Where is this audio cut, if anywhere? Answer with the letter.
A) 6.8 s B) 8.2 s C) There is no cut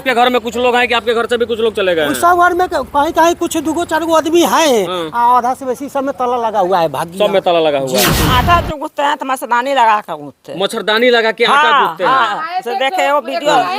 B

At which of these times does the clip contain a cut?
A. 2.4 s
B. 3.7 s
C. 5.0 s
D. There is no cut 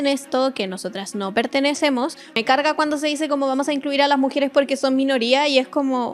A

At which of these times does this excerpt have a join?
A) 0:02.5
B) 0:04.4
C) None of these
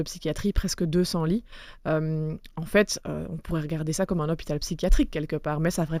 C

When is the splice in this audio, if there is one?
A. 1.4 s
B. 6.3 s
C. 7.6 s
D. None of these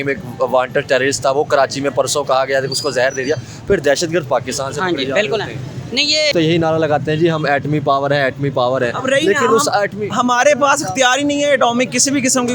B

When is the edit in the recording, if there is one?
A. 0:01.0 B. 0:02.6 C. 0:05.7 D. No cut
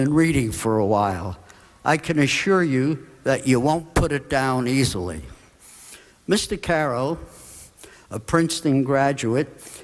A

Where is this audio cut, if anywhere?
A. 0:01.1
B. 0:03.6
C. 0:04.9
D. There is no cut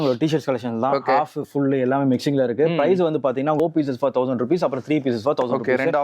B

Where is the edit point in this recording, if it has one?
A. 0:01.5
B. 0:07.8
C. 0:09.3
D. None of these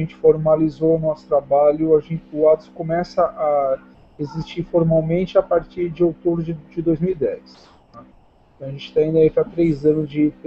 B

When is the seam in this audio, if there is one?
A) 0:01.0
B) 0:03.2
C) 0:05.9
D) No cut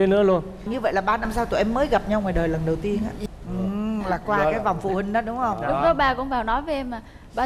B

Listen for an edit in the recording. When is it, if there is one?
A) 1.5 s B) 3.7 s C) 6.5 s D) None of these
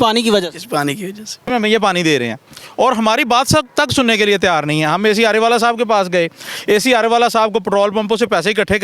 A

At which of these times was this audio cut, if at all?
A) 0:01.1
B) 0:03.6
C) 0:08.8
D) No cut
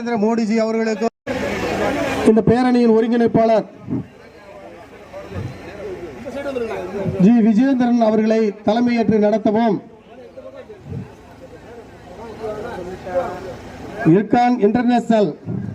A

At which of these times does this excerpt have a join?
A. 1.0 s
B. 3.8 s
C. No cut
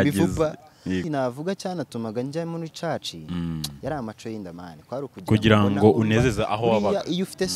A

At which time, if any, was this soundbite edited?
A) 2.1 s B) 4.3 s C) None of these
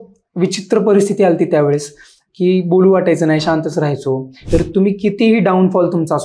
B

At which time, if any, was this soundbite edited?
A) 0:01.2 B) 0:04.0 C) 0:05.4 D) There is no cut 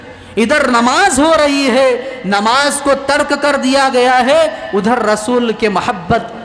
D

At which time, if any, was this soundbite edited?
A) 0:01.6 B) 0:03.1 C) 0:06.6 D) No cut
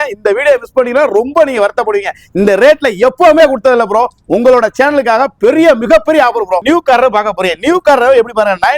C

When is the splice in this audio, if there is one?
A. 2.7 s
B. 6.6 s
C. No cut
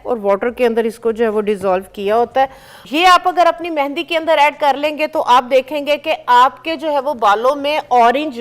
A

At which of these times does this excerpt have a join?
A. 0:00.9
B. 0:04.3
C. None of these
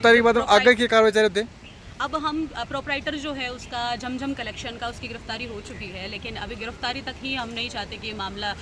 C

